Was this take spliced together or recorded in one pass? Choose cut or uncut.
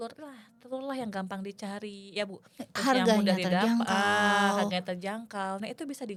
uncut